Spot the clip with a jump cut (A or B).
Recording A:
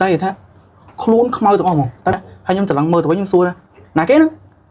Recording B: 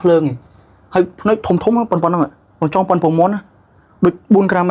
A